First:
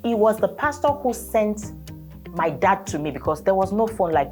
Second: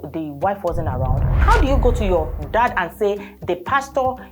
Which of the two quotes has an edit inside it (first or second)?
second